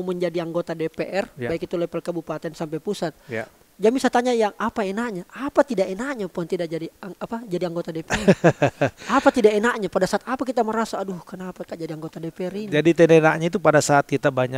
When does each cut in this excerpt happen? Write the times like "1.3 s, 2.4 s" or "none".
none